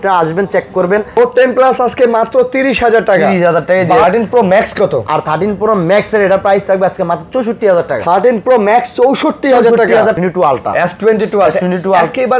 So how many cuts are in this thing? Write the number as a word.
three